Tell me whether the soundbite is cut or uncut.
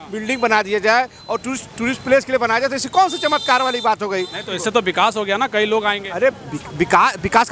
uncut